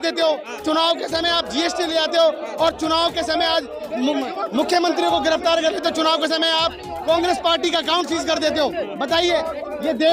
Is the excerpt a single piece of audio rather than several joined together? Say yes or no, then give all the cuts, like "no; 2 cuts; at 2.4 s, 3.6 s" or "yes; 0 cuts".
yes; 0 cuts